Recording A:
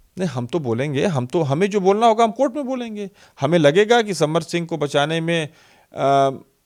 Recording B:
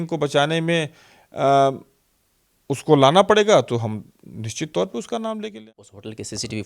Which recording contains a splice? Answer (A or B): B